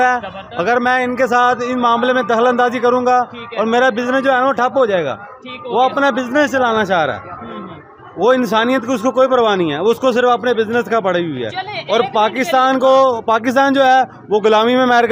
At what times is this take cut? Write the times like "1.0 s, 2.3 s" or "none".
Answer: none